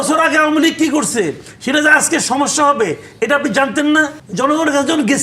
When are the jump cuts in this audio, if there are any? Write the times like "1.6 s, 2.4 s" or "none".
4.2 s